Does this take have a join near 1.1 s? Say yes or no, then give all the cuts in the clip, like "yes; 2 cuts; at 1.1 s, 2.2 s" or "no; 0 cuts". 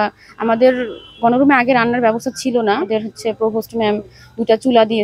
no; 1 cut; at 2.9 s